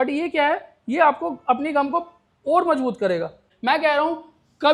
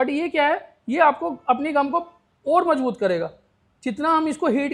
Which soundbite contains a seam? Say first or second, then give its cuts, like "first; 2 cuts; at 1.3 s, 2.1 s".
first; 1 cut; at 3.5 s